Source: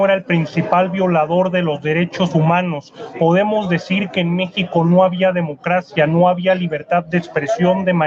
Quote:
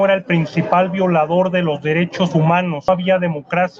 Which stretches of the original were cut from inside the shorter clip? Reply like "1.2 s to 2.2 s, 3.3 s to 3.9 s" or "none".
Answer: 2.9 s to 5.0 s